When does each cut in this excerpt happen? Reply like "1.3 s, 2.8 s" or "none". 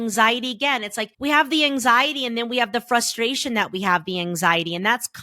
1.0 s

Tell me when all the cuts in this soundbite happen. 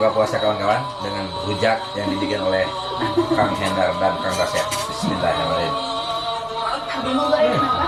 none

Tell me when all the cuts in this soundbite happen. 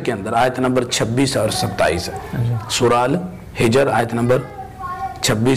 none

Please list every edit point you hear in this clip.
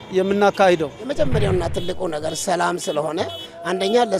1.2 s

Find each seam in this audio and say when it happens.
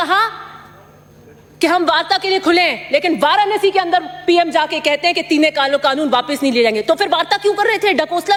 none

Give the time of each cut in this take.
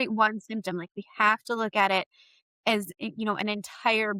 none

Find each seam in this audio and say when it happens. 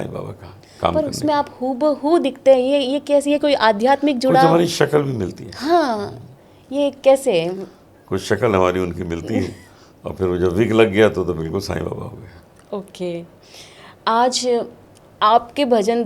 none

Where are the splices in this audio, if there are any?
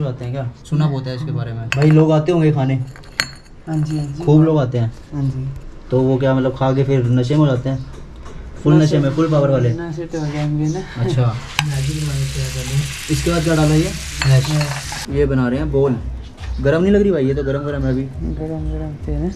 1.6 s, 11.5 s, 14.9 s

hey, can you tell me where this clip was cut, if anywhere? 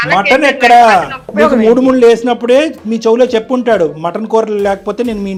none

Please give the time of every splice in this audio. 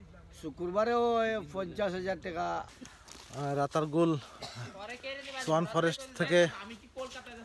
2.7 s

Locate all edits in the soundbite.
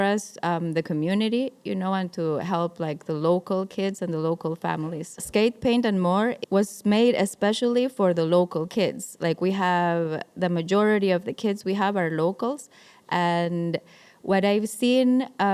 5.2 s, 6.4 s

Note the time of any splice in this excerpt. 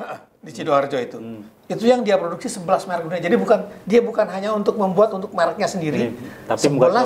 none

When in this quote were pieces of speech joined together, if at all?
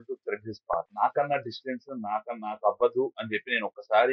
0.9 s

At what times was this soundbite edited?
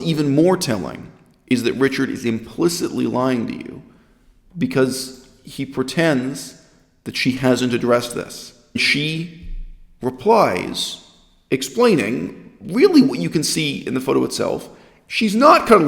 8.8 s

